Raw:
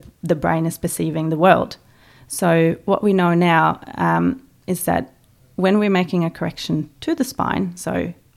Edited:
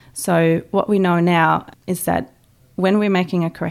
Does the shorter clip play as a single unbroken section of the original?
no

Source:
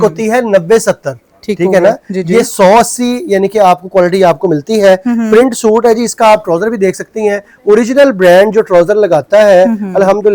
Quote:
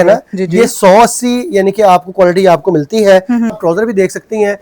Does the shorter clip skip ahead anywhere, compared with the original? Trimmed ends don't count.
yes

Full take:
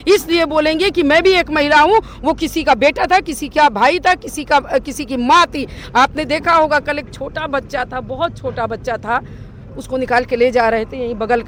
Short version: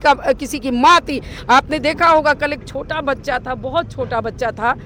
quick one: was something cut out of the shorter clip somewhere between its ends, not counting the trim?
no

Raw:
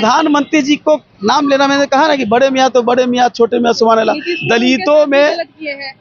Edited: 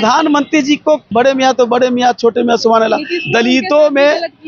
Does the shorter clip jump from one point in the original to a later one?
yes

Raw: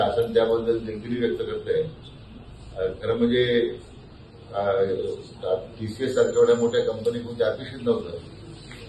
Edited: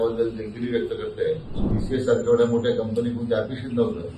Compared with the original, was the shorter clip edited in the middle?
yes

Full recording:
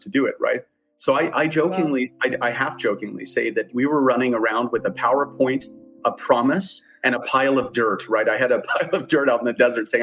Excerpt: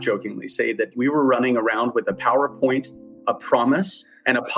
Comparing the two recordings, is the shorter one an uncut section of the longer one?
yes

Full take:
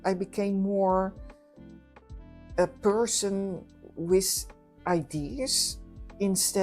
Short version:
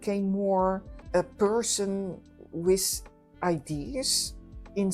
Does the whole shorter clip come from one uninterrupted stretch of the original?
no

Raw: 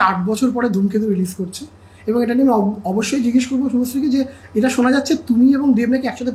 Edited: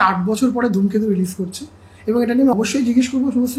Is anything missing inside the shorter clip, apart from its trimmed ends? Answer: yes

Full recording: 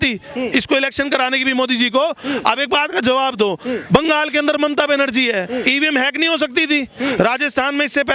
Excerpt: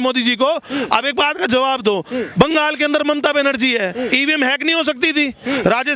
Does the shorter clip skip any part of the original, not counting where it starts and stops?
no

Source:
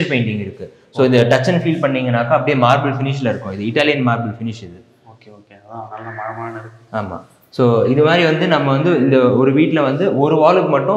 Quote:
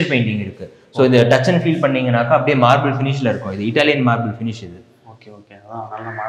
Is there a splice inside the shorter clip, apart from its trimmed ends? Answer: no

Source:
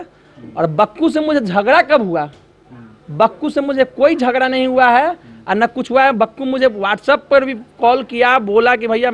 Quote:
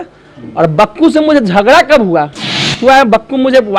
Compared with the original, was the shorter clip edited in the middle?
yes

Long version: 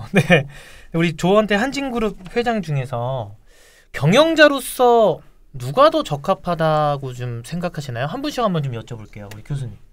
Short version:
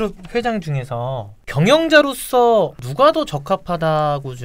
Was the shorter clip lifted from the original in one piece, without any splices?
no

